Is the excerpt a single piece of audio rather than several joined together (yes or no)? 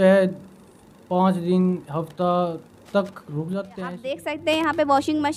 no